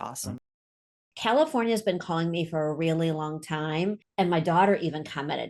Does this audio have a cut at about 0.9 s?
yes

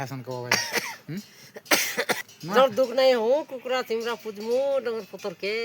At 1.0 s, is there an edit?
no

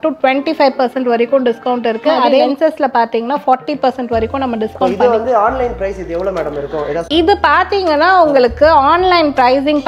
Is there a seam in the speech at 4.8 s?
yes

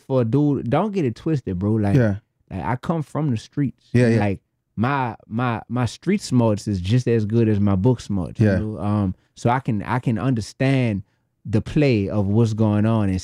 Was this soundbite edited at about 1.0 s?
no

